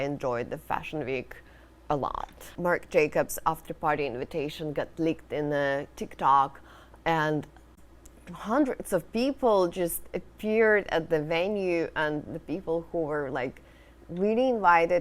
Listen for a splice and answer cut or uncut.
cut